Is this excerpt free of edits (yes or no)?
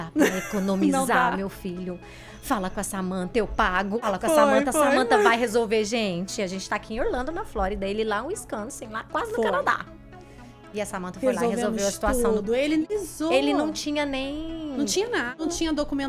no